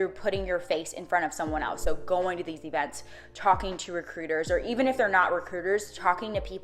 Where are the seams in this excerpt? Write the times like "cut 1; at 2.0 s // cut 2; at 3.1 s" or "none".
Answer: none